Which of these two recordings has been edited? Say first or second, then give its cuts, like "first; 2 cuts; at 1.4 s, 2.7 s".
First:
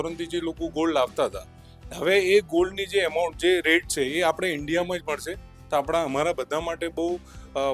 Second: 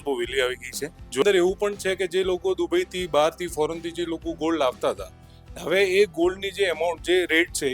second; 1 cut; at 1.2 s